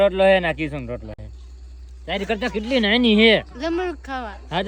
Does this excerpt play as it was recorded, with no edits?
yes; 0 cuts

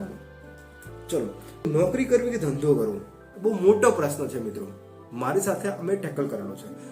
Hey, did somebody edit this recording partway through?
yes; 1 cut; at 1.7 s

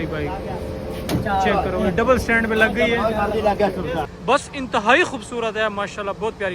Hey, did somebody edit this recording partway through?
yes; 1 cut; at 4.1 s

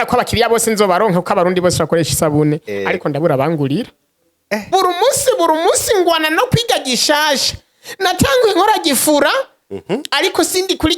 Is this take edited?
yes; 1 cut; at 4.6 s

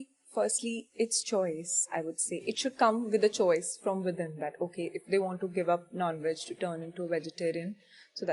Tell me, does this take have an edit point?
no; 0 cuts

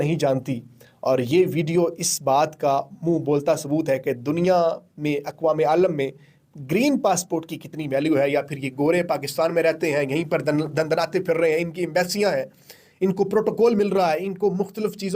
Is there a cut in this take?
no; 0 cuts

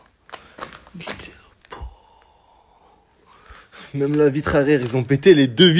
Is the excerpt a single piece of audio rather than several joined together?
yes; 0 cuts

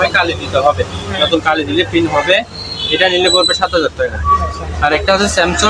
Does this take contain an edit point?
no; 0 cuts

